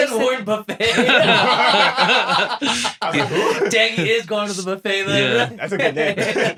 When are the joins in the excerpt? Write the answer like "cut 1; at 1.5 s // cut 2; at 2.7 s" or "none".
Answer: none

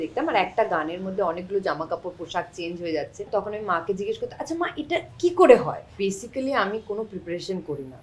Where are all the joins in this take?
cut 1; at 3.3 s // cut 2; at 5.9 s

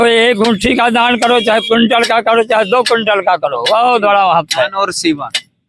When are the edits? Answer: none

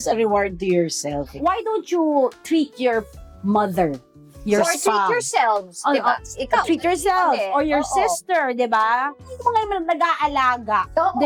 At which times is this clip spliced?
none

